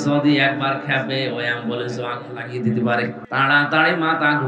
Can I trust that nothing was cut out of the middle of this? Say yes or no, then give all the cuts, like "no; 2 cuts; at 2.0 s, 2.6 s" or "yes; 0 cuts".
no; 1 cut; at 3.2 s